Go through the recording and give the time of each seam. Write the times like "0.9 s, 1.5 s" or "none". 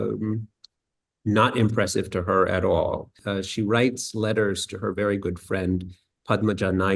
3.2 s